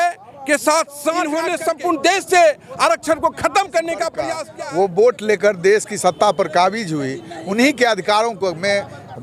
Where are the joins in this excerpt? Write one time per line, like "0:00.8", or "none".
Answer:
0:01.4
0:04.4